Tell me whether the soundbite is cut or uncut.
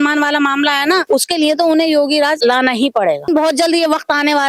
cut